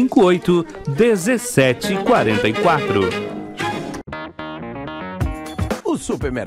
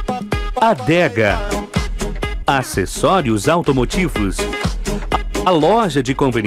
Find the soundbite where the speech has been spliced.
first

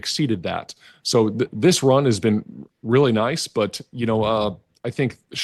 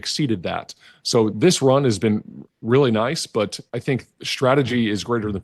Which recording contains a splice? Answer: second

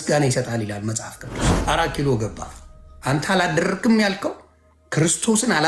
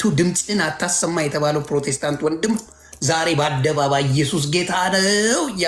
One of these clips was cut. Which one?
first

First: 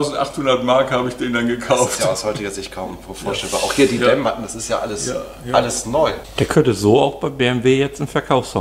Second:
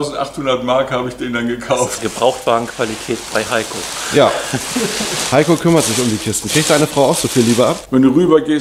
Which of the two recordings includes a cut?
second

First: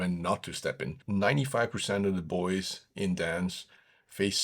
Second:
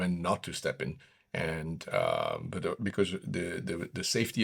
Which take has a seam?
first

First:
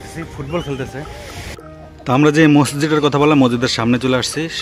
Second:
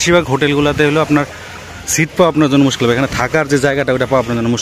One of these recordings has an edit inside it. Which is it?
first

